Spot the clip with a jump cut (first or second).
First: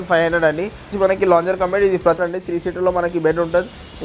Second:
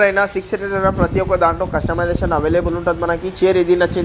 first